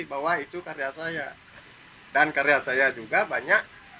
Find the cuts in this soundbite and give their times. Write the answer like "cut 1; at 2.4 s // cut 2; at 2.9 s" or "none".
cut 1; at 1.5 s